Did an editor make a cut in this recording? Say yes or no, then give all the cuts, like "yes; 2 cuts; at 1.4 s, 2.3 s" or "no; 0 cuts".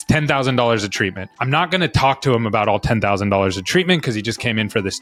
no; 0 cuts